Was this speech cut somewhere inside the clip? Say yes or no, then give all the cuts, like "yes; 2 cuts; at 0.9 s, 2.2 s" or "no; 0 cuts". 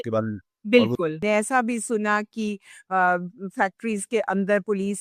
yes; 1 cut; at 1.2 s